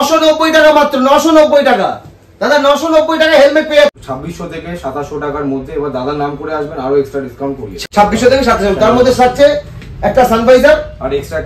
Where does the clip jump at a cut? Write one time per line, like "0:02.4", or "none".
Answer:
0:03.9
0:07.7